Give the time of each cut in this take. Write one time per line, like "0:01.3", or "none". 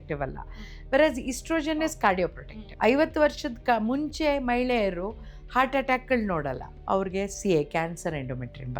0:02.5
0:06.7